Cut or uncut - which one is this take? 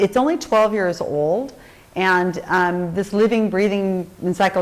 cut